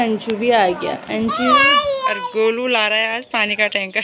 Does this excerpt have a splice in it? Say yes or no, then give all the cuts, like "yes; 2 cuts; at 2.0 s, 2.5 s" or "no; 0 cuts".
yes; 1 cut; at 2.1 s